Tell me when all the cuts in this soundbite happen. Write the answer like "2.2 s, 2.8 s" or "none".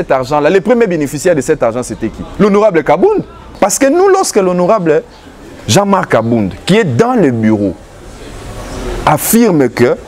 3.6 s

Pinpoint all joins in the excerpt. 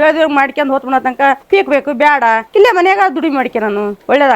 2.4 s

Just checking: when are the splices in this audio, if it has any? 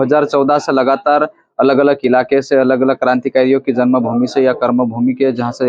none

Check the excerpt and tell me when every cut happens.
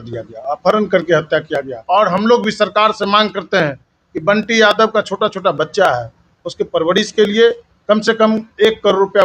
1.7 s

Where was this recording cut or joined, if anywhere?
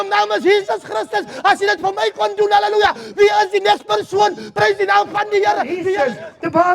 5.8 s

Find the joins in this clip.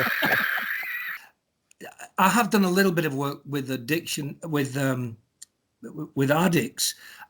1.0 s

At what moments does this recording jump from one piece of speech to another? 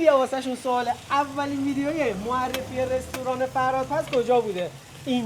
none

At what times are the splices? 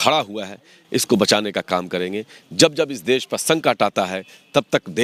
none

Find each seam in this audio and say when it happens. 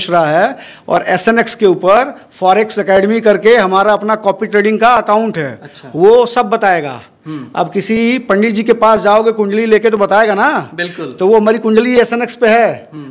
none

